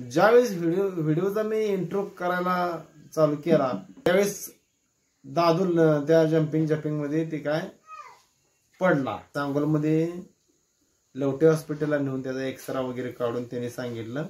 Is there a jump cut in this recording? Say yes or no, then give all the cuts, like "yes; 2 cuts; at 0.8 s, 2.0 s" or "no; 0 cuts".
yes; 2 cuts; at 4.1 s, 9.2 s